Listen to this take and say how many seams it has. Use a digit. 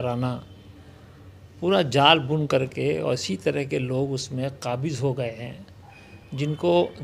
0